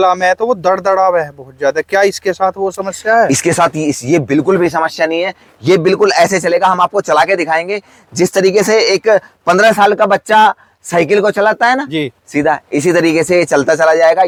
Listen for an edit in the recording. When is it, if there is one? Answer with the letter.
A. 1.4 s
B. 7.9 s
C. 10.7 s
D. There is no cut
D